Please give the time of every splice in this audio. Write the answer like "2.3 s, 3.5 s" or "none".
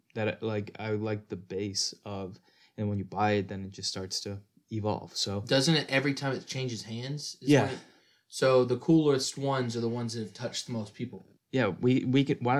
11.3 s